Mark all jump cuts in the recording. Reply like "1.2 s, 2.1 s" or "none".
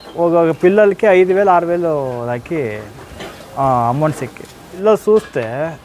4.8 s

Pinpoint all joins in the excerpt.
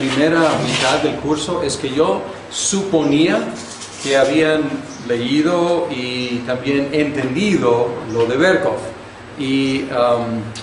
none

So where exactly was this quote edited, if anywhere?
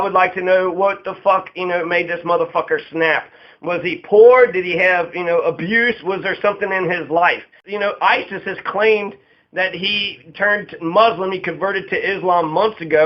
7.6 s

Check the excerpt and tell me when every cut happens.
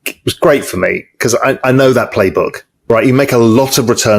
2.7 s

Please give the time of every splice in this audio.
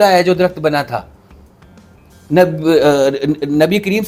none

